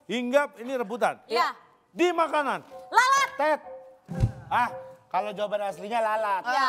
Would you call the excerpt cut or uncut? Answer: uncut